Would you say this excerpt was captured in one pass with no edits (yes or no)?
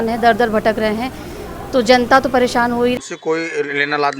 no